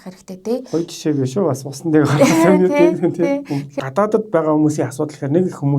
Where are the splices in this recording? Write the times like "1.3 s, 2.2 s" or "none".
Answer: 3.8 s